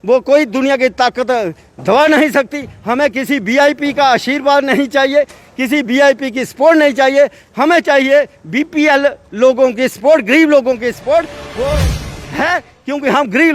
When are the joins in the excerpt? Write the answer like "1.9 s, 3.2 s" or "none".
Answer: 12.1 s